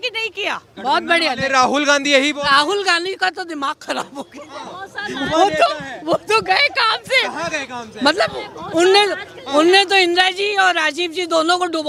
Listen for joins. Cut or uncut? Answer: uncut